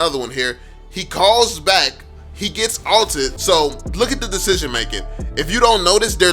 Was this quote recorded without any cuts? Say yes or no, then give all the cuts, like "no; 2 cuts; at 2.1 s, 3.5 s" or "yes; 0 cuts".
no; 1 cut; at 3.4 s